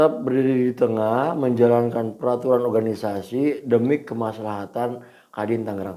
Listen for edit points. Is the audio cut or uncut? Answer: uncut